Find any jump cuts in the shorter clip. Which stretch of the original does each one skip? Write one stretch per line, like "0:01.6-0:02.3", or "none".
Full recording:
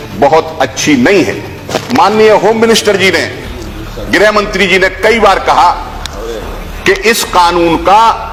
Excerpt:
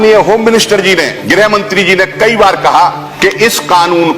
0:03.3-0:04.0
0:05.9-0:06.7